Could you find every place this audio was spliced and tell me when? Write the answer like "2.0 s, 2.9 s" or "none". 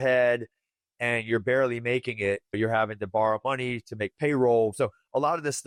none